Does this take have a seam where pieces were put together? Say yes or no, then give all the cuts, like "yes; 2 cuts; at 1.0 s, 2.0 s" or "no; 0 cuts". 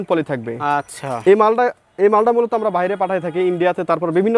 no; 0 cuts